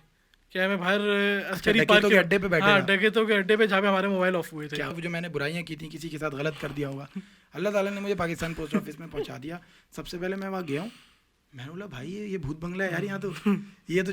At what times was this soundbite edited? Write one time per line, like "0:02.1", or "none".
0:05.0